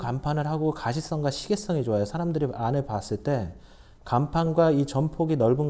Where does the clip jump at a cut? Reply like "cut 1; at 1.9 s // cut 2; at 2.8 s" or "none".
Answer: none